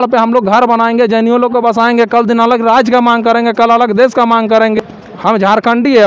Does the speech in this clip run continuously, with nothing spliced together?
no; 1 cut; at 4.7 s

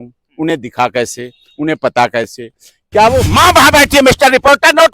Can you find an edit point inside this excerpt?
yes; 1 cut; at 3.3 s

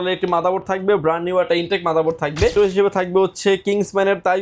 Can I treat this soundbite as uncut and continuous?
no; 1 cut; at 2.5 s

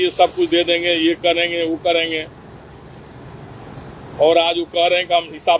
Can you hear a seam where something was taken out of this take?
no; 0 cuts

